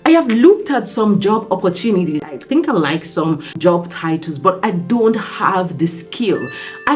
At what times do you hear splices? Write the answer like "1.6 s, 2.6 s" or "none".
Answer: 2.3 s, 3.6 s